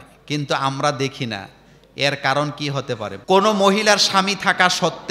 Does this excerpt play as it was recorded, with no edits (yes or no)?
no